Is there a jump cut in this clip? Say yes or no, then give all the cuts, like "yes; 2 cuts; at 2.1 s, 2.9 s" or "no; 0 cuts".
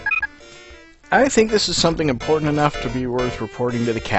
yes; 1 cut; at 2.2 s